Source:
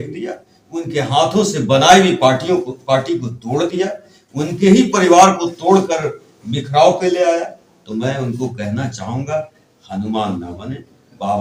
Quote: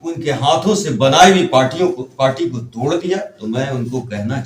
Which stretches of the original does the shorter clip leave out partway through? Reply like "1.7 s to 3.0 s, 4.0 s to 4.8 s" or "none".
4.1 s to 7.8 s